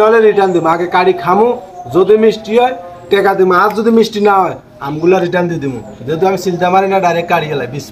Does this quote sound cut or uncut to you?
uncut